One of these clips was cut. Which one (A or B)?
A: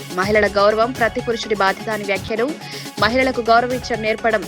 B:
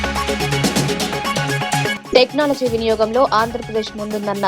B